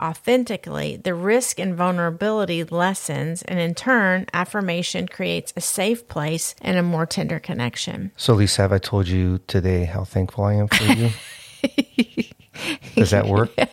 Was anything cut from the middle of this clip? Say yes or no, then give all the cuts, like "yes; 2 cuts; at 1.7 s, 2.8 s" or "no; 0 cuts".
no; 0 cuts